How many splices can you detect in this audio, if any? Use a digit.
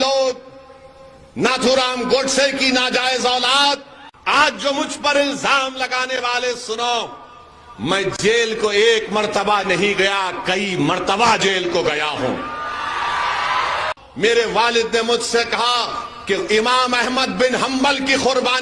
2